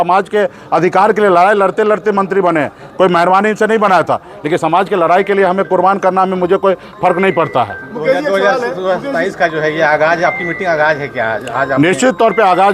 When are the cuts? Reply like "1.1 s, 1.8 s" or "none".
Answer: none